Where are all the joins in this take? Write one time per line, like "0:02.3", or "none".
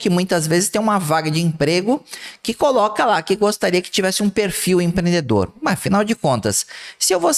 none